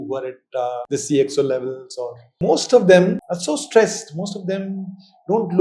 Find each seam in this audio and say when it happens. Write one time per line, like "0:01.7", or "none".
0:00.8
0:02.3
0:03.3